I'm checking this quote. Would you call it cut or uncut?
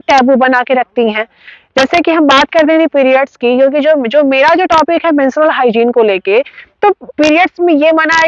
uncut